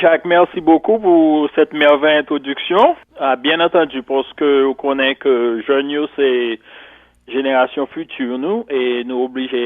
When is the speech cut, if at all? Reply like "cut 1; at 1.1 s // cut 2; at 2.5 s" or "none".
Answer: cut 1; at 3.1 s